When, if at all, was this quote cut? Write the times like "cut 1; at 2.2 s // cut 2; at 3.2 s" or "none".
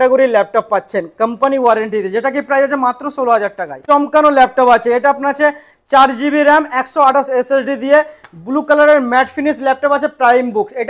cut 1; at 3.7 s